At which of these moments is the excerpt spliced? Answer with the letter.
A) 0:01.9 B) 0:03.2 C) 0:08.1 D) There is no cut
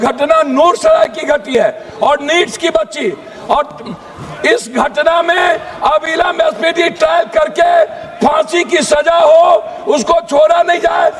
D